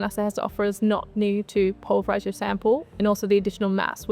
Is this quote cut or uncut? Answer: cut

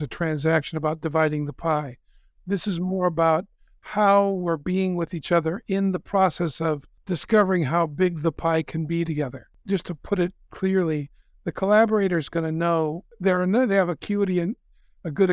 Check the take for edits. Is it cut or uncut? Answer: cut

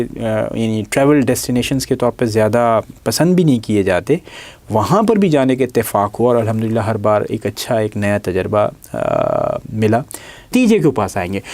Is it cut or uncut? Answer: cut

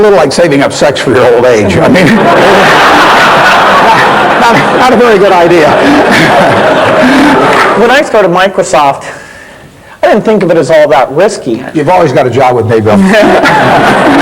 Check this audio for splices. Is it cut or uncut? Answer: cut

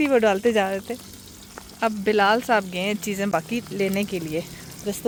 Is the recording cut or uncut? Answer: uncut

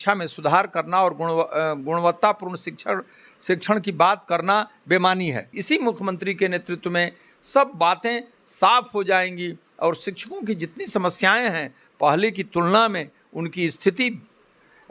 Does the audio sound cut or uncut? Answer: cut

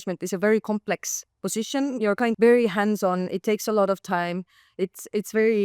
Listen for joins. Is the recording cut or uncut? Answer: cut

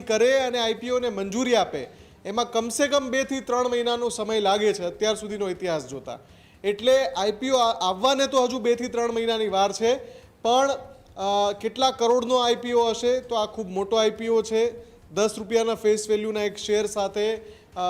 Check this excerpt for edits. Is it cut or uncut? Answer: uncut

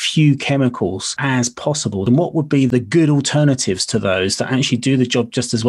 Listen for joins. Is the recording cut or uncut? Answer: cut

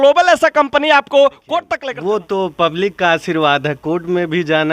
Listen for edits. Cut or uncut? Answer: cut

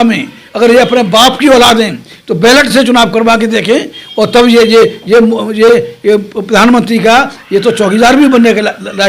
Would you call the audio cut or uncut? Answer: uncut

